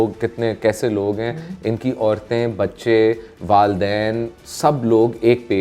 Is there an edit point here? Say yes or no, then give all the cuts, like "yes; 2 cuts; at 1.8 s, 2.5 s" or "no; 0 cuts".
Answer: no; 0 cuts